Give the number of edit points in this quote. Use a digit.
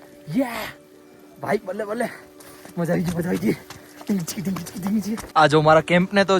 1